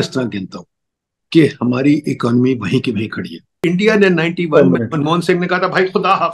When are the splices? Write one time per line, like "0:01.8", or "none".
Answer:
0:03.4